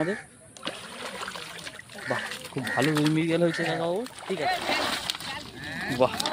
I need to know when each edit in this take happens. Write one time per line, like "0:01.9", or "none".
0:04.1